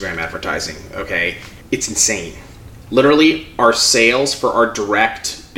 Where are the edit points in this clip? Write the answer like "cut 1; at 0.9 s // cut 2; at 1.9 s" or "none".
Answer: cut 1; at 1.5 s